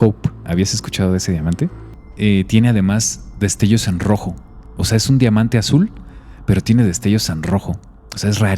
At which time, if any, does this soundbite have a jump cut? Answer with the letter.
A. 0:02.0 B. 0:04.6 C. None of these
A